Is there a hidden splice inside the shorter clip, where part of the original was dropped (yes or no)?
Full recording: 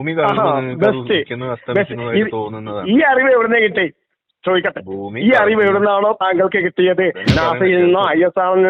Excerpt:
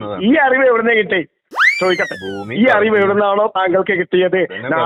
no